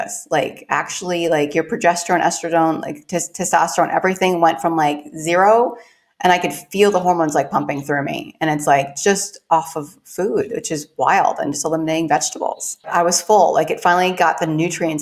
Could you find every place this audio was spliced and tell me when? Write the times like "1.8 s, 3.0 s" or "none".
12.9 s

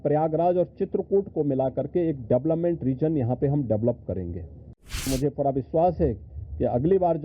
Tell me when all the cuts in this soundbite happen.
5.1 s

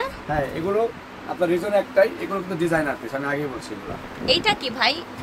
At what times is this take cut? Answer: none

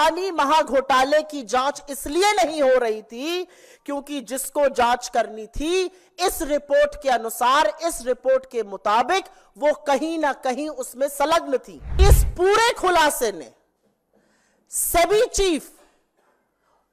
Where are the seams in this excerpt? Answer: 12.0 s

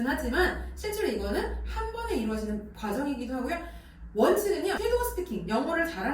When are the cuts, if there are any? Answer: 2.7 s, 4.8 s

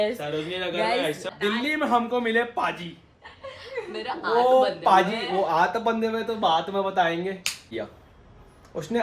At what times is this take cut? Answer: 1.2 s, 7.8 s

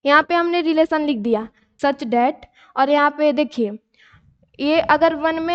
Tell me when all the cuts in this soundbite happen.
1.6 s

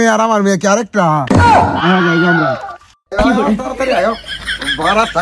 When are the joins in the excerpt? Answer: none

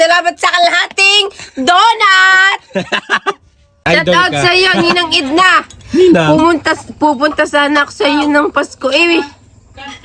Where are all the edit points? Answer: 3.8 s

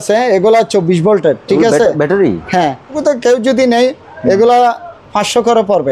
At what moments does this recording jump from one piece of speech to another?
3.0 s

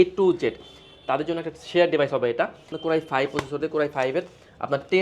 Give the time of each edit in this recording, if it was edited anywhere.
2.7 s

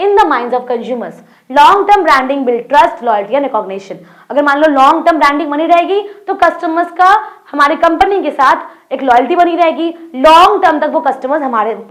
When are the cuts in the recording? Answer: none

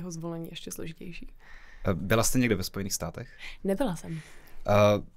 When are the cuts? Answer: none

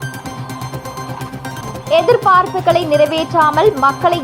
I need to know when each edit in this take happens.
1.9 s

